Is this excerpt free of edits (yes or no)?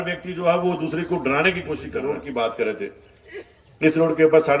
no